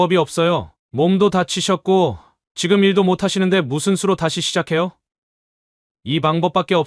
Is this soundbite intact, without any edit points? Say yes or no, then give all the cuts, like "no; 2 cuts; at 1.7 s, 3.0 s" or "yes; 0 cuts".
yes; 0 cuts